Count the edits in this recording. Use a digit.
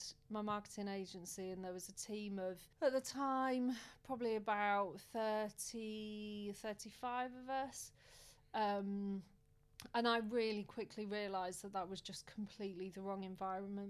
0